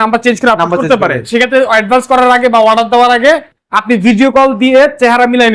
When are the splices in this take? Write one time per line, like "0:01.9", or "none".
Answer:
none